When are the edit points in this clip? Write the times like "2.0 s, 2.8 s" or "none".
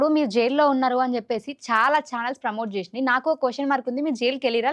none

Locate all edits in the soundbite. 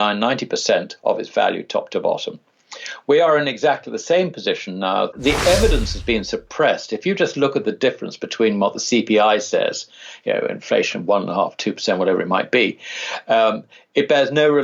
5.1 s

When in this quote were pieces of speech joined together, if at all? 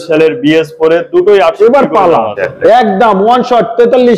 2.4 s

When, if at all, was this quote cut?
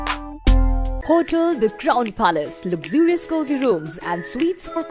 0.9 s

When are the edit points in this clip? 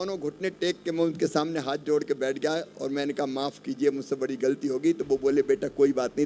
none

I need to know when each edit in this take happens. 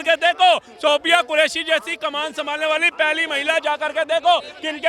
none

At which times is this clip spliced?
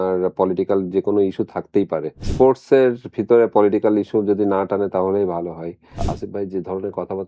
2.2 s, 6.0 s

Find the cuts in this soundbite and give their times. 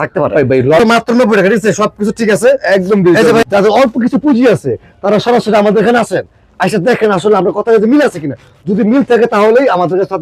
0.8 s, 3.4 s

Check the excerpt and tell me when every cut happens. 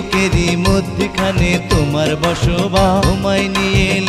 none

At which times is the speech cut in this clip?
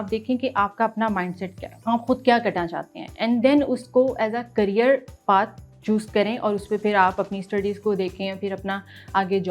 1.7 s

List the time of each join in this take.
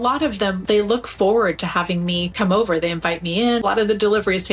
3.6 s

